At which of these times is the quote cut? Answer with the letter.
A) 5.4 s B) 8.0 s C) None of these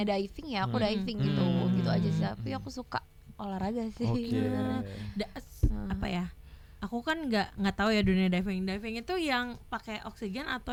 C